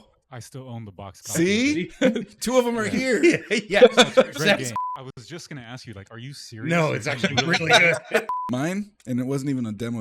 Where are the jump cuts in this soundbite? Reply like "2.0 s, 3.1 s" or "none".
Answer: 4.8 s, 8.3 s